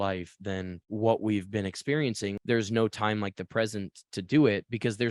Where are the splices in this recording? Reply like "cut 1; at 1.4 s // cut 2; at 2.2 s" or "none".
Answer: cut 1; at 2.4 s